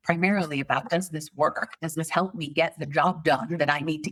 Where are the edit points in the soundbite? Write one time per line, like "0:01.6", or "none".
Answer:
none